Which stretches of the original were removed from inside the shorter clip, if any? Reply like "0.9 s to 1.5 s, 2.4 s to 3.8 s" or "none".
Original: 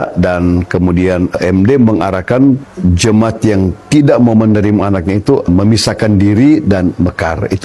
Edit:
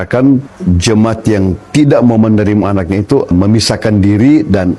none